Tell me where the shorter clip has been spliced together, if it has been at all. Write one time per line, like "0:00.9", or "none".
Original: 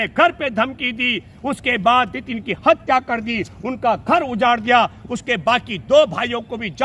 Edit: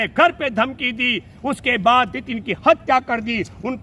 none

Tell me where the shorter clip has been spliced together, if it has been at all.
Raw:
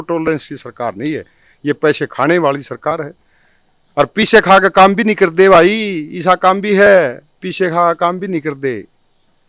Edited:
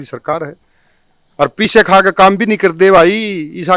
none

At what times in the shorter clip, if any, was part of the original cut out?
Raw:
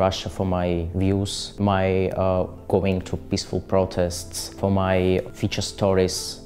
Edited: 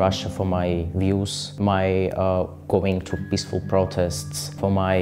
none

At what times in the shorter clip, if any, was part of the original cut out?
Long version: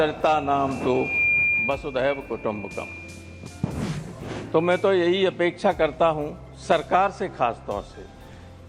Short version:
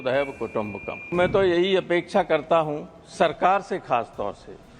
0:01.1

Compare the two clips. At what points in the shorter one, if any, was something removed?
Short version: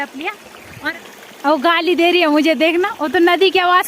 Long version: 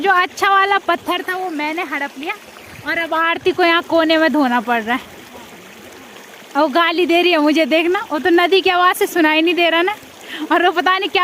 0:00.9

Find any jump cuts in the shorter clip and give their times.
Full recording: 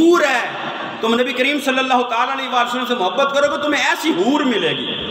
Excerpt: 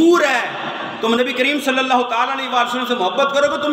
none

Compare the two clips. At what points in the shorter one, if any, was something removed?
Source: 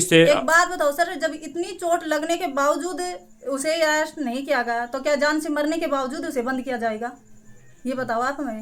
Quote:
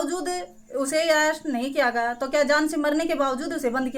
none

